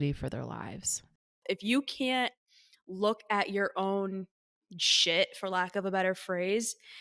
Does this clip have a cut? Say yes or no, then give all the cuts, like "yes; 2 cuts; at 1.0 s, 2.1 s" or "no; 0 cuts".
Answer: yes; 1 cut; at 1.3 s